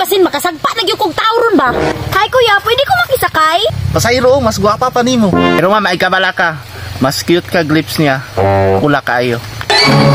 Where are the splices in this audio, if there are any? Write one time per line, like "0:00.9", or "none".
0:01.9
0:03.7
0:05.6